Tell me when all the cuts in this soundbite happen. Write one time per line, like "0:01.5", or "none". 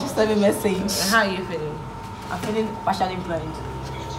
none